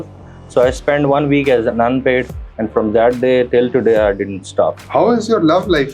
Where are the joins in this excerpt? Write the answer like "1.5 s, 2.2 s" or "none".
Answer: 4.8 s